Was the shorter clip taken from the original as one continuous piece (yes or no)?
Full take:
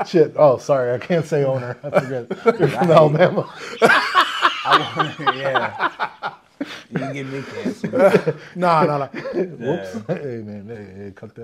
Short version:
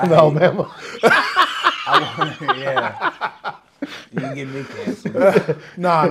yes